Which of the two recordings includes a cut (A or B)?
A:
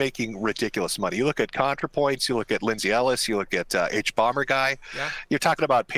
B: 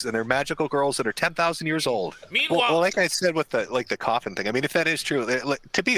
B